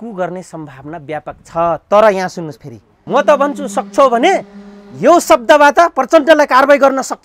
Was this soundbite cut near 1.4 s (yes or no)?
no